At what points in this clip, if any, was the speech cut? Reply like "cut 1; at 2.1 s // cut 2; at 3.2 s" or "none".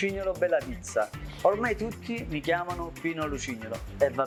none